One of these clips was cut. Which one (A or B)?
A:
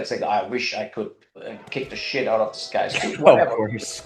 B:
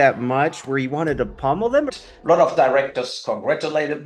B